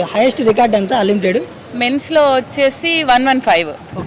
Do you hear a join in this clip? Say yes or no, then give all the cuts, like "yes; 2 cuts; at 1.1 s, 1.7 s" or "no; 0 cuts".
no; 0 cuts